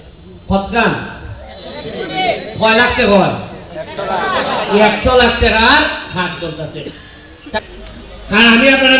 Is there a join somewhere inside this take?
yes; 1 cut; at 7.6 s

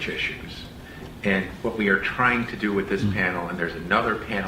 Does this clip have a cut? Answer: yes; 1 cut; at 3.4 s

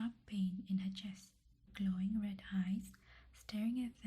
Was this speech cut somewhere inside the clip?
yes; 1 cut; at 1.7 s

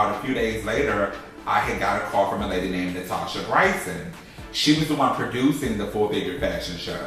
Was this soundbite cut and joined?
yes; 1 cut; at 1.6 s

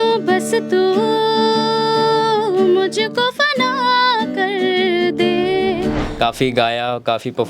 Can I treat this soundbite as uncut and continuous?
no; 1 cut; at 6.0 s

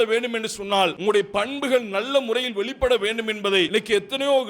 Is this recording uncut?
no; 2 cuts; at 1.0 s, 3.7 s

